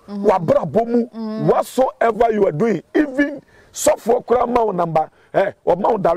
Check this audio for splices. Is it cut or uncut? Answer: uncut